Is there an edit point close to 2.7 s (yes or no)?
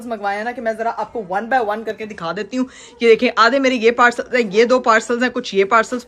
no